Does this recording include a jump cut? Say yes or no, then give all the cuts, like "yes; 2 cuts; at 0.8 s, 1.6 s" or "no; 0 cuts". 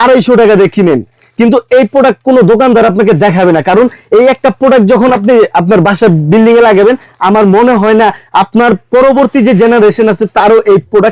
no; 0 cuts